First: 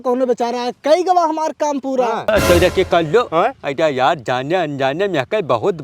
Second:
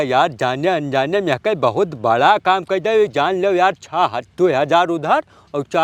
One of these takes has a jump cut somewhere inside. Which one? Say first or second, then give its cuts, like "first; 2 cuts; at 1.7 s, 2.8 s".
first; 1 cut; at 2.2 s